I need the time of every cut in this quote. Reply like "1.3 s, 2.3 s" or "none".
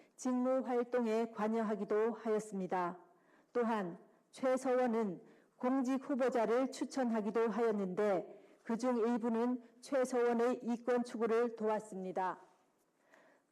none